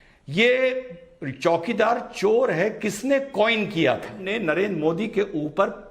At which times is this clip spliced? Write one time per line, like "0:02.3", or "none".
0:04.2